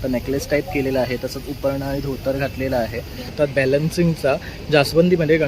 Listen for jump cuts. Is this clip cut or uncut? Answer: cut